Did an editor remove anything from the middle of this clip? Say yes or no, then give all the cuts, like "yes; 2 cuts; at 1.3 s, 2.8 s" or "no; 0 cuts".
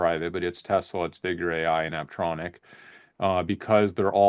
no; 0 cuts